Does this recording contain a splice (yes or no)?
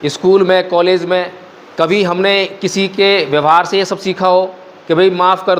no